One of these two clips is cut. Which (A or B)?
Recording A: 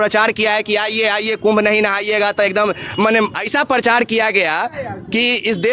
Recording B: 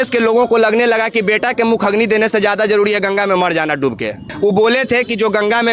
B